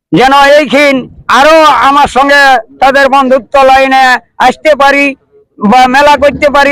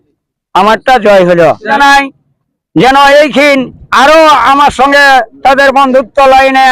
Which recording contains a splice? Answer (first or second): second